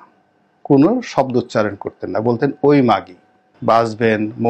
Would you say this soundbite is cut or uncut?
cut